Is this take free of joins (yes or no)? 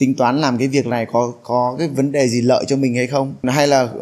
yes